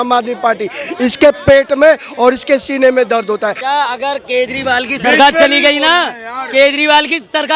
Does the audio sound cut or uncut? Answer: cut